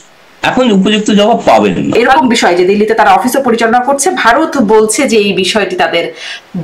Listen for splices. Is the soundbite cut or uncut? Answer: cut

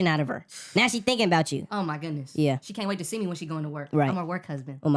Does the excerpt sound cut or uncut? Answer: uncut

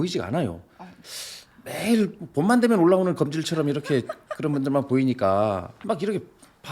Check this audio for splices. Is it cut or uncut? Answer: cut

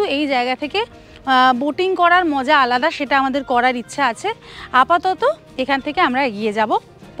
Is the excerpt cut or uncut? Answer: uncut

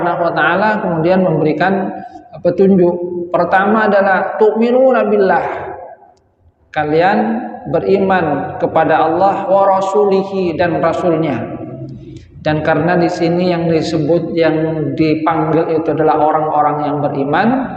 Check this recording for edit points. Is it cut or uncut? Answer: uncut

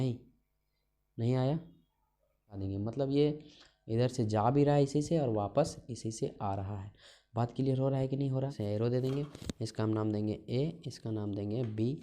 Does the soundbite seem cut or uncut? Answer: cut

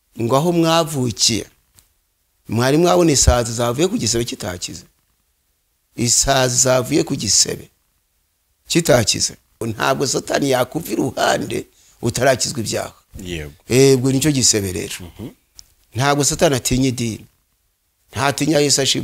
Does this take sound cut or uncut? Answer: cut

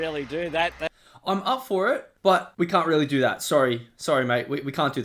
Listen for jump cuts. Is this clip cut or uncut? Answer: uncut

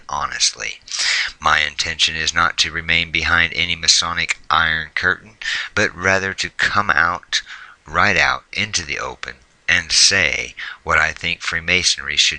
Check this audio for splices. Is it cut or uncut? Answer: uncut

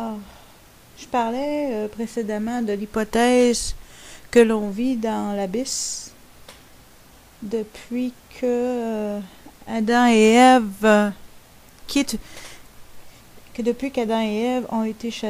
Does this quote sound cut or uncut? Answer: cut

